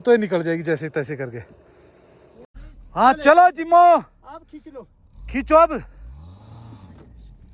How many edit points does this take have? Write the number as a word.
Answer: zero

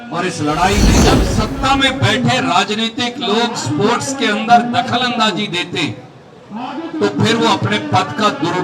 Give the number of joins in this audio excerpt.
one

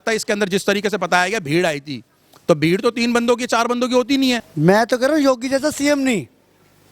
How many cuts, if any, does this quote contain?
one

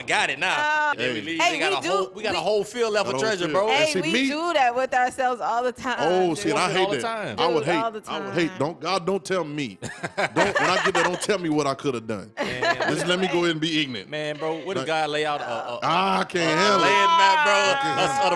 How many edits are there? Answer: one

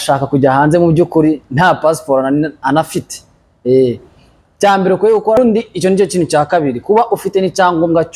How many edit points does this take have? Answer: one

